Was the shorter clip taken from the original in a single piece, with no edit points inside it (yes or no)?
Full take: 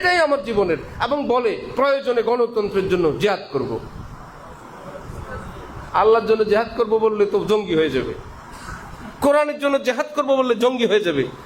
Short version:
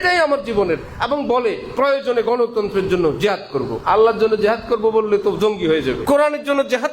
no